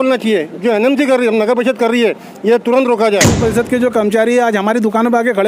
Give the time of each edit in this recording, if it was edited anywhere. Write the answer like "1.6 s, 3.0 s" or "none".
3.4 s